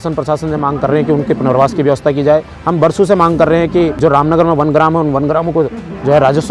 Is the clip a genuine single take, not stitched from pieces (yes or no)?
no